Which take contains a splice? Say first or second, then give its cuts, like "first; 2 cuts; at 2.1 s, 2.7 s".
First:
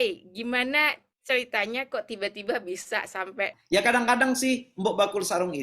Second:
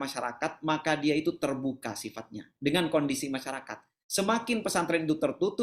first; 1 cut; at 3.6 s